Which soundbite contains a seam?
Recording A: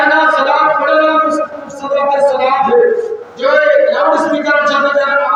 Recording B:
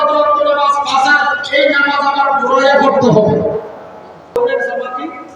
B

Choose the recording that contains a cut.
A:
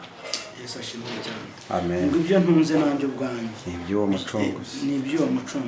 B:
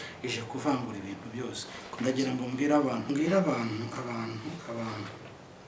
B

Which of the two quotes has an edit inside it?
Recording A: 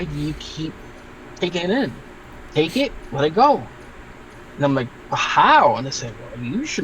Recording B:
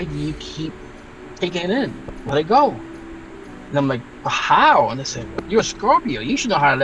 B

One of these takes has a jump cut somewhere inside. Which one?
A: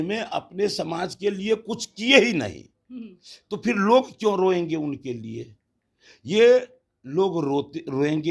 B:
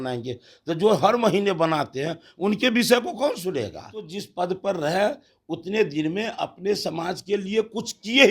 B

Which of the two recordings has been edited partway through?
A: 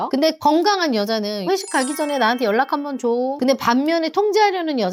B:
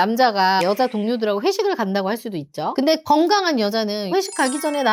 A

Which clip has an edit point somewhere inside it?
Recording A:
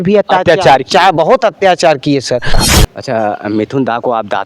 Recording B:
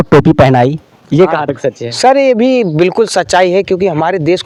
A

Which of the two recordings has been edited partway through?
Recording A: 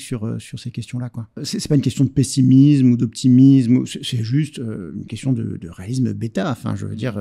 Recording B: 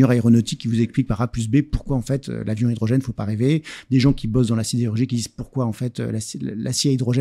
A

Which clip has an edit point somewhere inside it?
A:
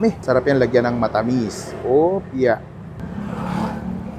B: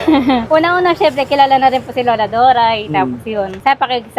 A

